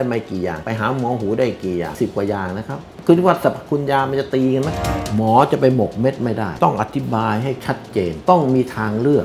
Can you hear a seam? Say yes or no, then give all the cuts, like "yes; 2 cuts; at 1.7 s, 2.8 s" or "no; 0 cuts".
yes; 3 cuts; at 1.9 s, 4.8 s, 8.2 s